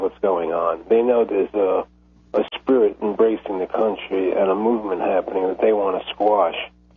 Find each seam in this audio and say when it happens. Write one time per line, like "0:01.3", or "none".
0:05.1